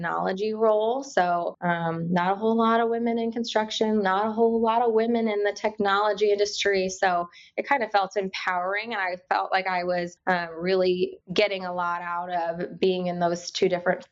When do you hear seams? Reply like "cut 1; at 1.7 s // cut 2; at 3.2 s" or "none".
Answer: cut 1; at 1.5 s // cut 2; at 10.1 s // cut 3; at 11.2 s